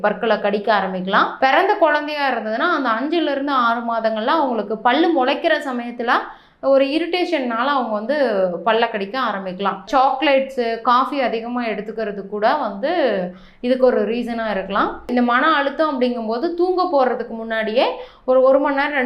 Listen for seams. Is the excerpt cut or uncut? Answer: cut